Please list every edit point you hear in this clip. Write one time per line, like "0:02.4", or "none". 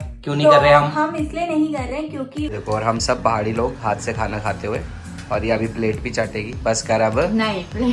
0:02.6